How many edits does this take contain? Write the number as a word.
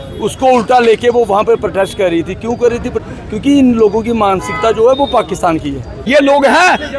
two